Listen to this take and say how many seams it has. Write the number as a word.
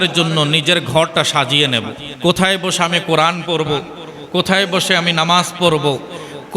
one